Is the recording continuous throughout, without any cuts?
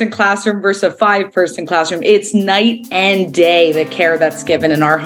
yes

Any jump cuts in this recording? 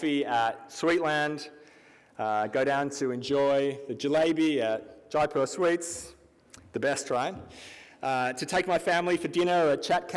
no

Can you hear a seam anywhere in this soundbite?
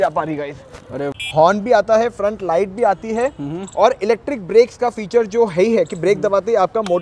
yes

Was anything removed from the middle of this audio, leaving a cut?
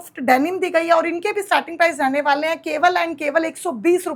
no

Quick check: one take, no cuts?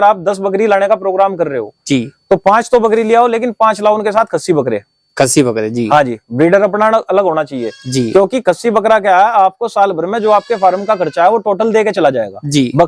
yes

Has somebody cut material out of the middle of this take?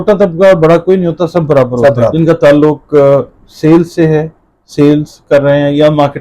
yes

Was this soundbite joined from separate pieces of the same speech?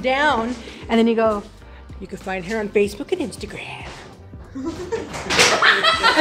no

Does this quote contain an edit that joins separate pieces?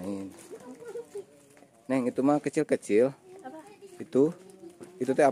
no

